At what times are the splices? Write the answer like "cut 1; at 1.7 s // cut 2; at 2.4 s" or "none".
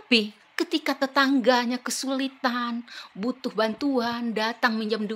none